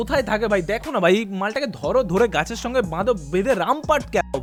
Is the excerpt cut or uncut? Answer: uncut